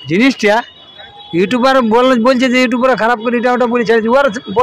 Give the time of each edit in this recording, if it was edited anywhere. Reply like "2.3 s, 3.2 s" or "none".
none